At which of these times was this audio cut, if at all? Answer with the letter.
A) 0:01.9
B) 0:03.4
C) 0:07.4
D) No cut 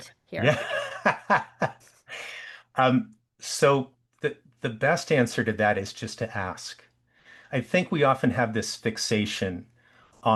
D